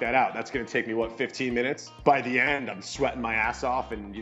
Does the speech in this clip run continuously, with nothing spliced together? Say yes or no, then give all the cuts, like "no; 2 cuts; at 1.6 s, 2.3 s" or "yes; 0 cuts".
no; 1 cut; at 1.9 s